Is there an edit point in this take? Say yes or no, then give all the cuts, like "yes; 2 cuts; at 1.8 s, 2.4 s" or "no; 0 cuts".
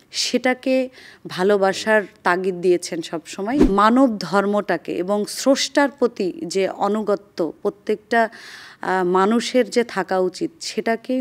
yes; 1 cut; at 3.6 s